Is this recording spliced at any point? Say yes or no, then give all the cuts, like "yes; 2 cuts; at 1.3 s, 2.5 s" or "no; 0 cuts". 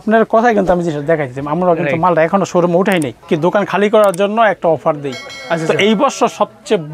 yes; 1 cut; at 3.2 s